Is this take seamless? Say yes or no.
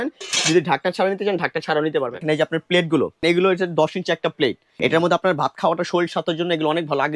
no